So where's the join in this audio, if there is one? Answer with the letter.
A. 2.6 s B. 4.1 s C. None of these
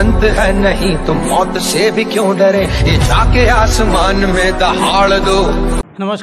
C